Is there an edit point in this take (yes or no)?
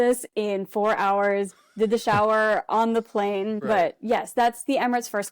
yes